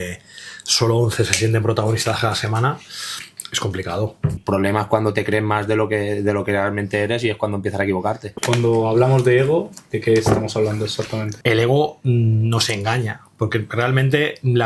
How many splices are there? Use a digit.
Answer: 3